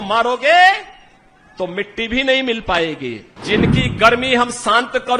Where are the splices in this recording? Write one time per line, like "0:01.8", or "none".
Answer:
0:03.3